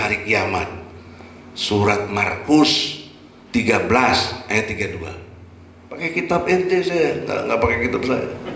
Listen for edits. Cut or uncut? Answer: uncut